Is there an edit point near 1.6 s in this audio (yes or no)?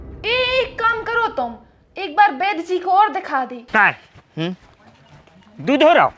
no